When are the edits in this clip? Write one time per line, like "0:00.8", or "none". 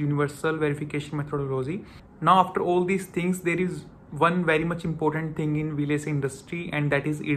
0:01.9